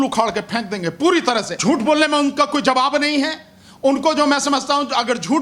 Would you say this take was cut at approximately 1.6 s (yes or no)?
yes